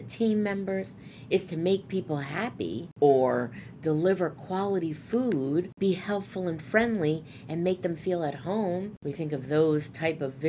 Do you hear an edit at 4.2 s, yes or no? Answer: no